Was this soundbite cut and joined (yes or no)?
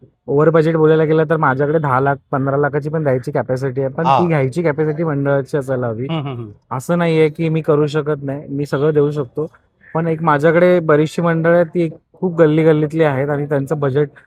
no